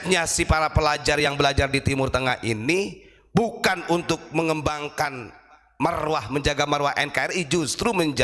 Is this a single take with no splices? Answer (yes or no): yes